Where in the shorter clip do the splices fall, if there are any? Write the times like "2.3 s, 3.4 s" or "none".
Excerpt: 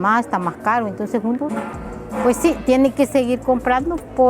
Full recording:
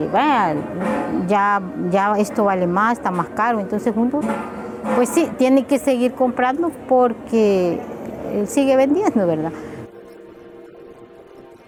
none